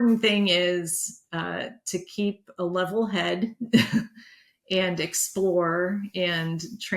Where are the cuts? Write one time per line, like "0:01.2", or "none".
none